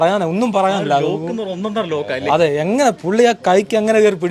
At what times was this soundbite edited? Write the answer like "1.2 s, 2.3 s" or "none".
none